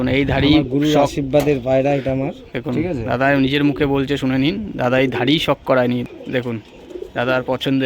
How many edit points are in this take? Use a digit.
1